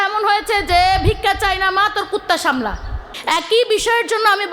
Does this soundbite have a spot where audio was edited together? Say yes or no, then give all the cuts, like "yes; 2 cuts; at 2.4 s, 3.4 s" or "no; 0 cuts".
yes; 1 cut; at 3.1 s